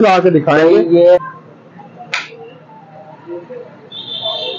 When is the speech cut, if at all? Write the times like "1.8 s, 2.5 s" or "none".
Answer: 1.2 s